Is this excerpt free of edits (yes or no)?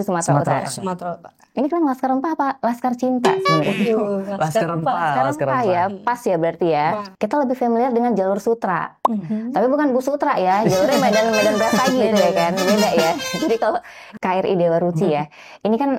no